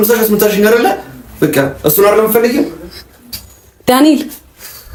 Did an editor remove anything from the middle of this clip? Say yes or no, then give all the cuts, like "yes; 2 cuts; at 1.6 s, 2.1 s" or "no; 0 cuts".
no; 0 cuts